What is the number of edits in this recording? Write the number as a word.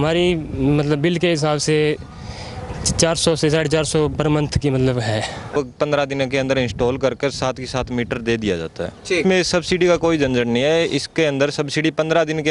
two